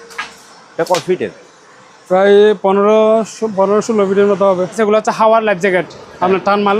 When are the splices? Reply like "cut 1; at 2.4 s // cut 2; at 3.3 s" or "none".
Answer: cut 1; at 4.8 s